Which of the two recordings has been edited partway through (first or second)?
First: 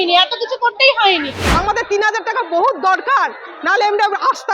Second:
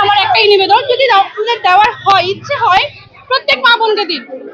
first